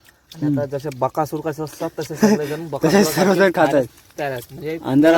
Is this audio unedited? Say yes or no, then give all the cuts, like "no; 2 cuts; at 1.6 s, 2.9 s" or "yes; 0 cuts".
yes; 0 cuts